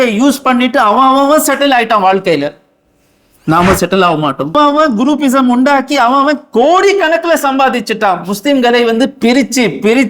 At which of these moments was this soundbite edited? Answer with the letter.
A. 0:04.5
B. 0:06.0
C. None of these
A